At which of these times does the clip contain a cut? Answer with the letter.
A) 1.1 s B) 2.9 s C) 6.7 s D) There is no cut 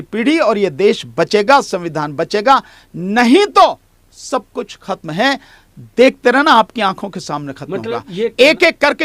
D